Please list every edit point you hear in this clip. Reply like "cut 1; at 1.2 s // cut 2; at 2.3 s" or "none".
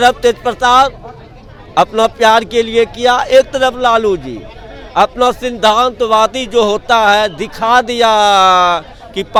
none